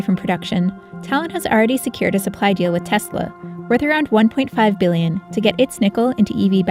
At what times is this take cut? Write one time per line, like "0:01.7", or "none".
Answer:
none